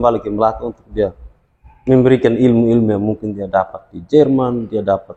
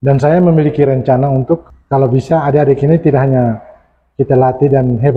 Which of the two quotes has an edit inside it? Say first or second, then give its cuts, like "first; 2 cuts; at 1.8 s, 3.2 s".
second; 1 cut; at 1.7 s